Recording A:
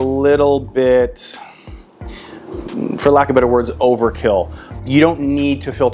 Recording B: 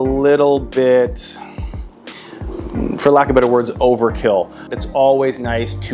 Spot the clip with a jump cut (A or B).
B